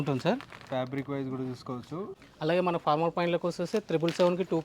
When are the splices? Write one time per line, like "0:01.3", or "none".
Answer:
0:02.2